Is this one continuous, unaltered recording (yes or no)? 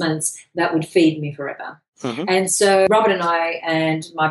no